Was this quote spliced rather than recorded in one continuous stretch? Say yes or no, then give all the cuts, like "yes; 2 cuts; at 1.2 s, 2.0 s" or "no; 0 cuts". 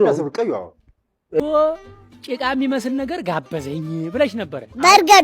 yes; 1 cut; at 1.4 s